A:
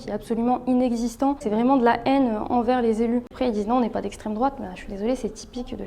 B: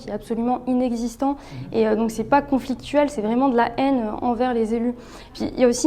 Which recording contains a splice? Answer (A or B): A